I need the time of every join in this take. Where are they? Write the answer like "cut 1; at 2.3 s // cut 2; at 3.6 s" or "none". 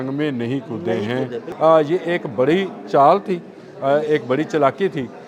cut 1; at 1.4 s